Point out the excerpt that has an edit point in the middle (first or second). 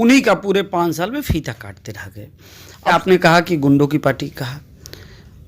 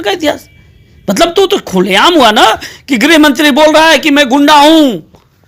first